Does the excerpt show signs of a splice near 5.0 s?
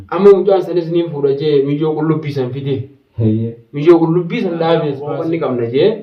yes; 1 cut; at 5.0 s

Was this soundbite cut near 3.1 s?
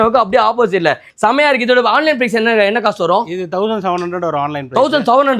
no; 1 cut; at 1.0 s

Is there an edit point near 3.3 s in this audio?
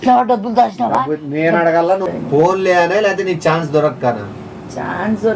no; 2 cuts; at 0.9 s, 2.0 s

